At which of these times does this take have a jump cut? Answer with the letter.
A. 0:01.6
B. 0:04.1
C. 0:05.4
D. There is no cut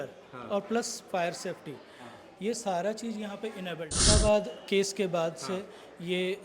B